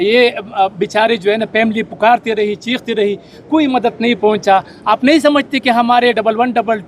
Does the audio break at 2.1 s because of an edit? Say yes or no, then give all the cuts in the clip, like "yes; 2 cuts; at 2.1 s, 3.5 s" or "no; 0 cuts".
no; 0 cuts